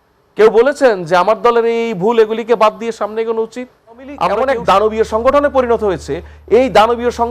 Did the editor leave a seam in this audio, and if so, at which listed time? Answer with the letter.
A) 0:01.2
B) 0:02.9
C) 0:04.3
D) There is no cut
C